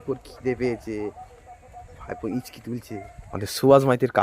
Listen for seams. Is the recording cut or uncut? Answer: cut